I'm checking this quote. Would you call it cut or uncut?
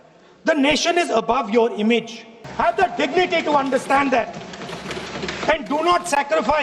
cut